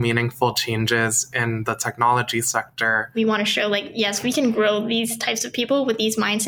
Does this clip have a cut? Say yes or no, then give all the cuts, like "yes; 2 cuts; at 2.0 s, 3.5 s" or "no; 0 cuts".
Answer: yes; 1 cut; at 3.1 s